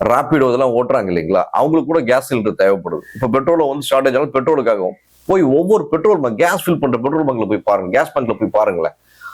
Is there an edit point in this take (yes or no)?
no